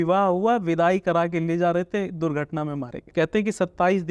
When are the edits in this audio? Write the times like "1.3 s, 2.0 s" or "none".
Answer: 3.0 s